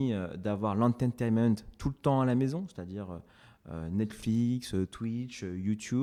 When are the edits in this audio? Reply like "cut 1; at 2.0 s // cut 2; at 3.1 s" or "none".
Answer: none